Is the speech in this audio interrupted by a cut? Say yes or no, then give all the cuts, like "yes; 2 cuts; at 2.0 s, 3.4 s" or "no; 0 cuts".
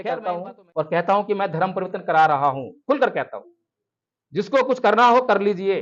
no; 0 cuts